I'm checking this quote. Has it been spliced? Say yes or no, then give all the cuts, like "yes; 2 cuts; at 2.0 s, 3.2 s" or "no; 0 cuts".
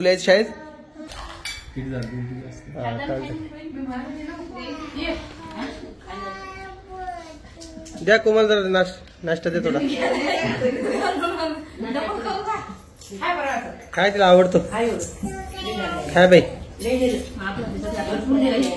yes; 1 cut; at 1.1 s